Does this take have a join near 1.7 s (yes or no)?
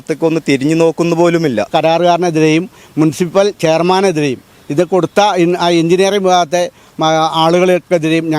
yes